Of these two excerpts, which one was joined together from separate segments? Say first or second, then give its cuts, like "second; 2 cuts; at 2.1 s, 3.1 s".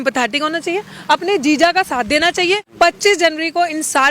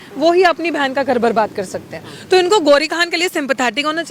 first; 1 cut; at 2.7 s